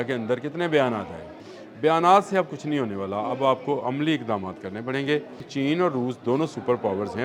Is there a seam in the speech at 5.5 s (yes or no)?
yes